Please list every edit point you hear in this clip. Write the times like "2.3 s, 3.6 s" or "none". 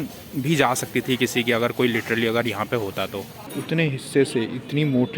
3.3 s